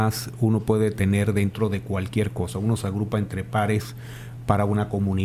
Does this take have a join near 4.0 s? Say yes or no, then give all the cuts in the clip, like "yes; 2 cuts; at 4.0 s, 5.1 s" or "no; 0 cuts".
no; 0 cuts